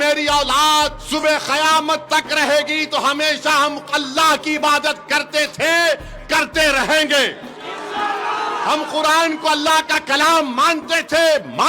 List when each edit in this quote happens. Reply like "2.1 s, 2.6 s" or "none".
1.0 s

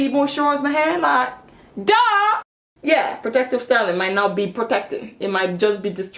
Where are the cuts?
2.4 s

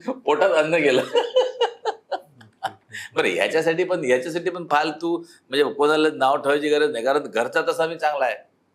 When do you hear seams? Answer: none

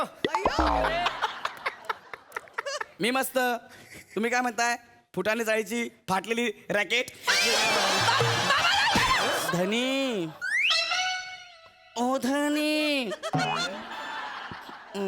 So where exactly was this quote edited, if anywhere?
9.4 s

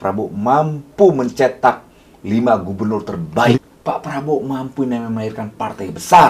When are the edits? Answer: 3.7 s

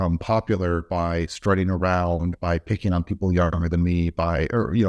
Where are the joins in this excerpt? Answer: none

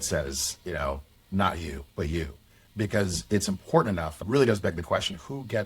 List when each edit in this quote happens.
2.6 s, 4.2 s

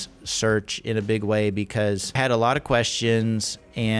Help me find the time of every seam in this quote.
2.1 s

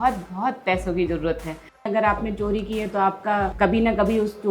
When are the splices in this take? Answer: 1.9 s, 3.5 s

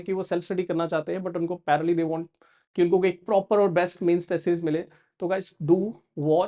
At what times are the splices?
none

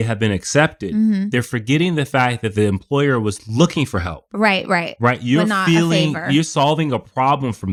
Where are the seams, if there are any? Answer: none

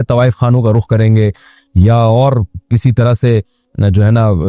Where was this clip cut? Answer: none

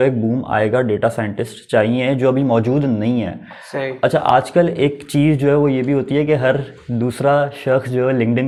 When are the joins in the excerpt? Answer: none

